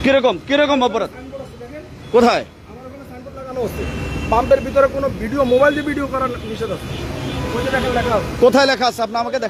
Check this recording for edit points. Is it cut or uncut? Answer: uncut